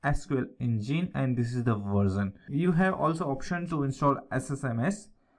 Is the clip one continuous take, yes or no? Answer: yes